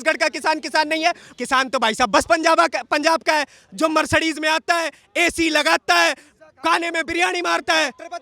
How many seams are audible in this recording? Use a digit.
1